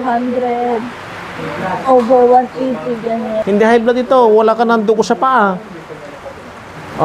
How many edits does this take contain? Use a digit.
1